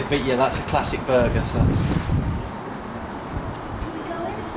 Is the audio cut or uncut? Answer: uncut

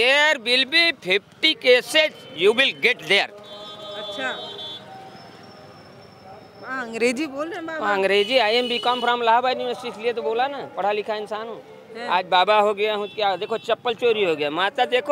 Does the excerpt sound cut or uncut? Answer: uncut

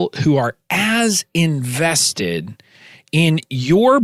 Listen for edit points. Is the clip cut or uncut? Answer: uncut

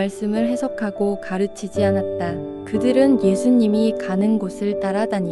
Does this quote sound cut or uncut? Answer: uncut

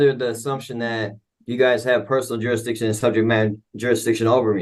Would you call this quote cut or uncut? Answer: uncut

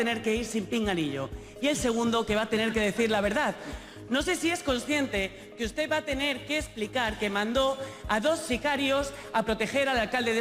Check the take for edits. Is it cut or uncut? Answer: uncut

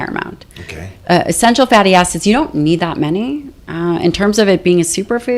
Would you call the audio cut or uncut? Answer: uncut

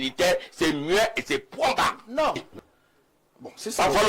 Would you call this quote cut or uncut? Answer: cut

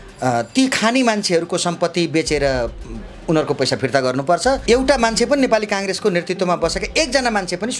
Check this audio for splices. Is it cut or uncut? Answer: cut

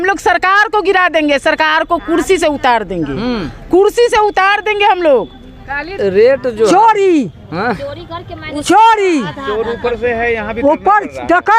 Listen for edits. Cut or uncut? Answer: cut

